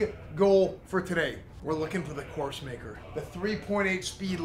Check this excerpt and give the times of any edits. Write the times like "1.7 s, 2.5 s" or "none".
1.5 s, 2.9 s